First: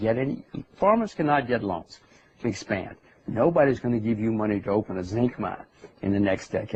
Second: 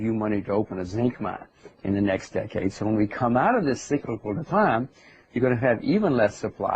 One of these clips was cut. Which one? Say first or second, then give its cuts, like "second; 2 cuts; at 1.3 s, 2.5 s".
second; 1 cut; at 4.4 s